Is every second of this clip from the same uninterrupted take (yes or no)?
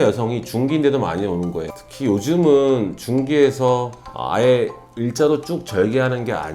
no